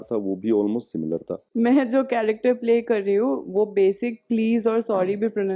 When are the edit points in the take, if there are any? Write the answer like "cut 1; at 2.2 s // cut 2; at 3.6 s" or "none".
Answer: cut 1; at 1.4 s

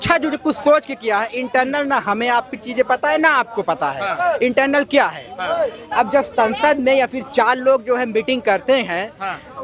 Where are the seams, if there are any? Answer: none

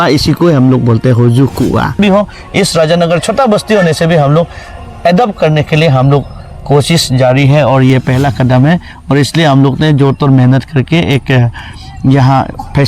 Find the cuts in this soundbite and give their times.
cut 1; at 2.0 s

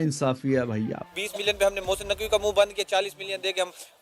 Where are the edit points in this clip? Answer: cut 1; at 1.0 s

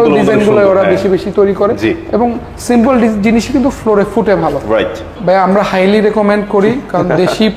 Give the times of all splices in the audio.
cut 1; at 5.1 s

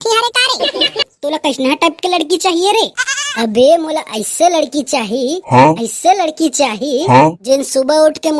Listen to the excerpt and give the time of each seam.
cut 1; at 1.1 s

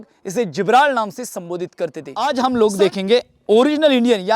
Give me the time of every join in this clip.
cut 1; at 2.1 s

